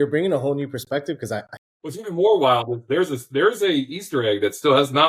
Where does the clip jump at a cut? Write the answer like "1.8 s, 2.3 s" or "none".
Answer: 1.5 s